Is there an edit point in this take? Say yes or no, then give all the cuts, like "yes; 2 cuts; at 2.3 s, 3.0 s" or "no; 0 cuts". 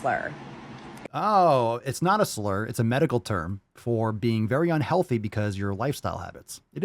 no; 0 cuts